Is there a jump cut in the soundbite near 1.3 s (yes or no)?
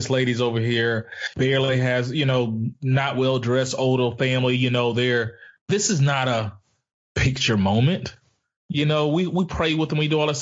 yes